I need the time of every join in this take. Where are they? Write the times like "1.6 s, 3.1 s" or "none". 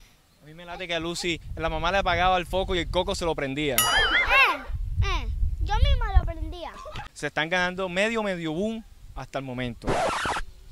7.0 s